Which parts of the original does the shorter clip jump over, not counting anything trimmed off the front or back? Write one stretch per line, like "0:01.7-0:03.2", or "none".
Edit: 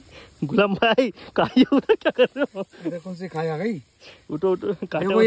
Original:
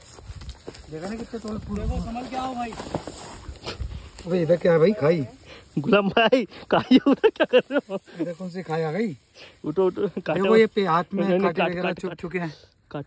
none